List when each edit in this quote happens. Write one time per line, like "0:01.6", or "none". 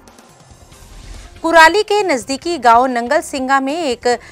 0:00.9